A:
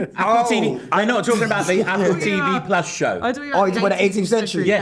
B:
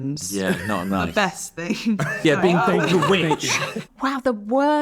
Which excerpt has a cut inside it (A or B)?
B